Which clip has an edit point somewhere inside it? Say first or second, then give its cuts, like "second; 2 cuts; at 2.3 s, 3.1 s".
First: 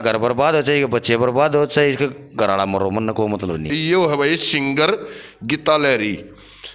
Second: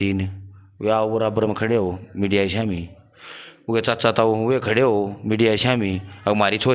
first; 1 cut; at 3.7 s